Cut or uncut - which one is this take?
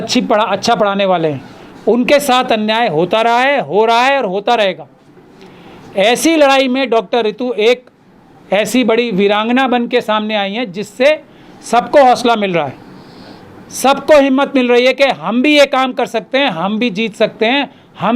uncut